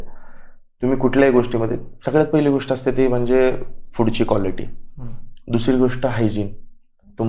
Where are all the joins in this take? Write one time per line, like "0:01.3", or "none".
none